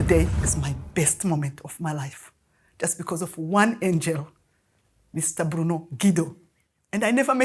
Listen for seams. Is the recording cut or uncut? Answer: uncut